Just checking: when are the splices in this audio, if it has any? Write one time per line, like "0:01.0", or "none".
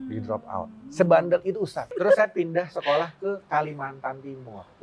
0:01.9